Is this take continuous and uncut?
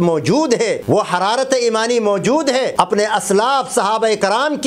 no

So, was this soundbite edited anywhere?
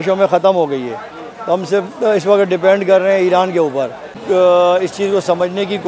yes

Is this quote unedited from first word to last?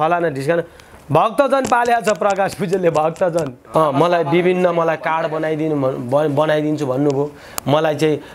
no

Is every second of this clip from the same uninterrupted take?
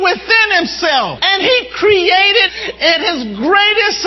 no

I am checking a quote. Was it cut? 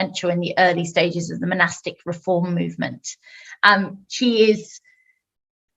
no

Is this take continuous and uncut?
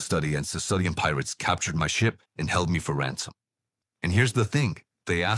no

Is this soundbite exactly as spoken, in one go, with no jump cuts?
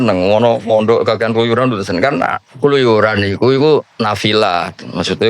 no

